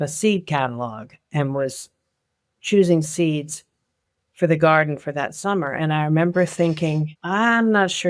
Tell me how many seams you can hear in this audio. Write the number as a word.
one